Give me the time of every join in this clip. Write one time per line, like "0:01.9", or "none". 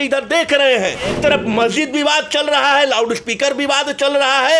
0:01.2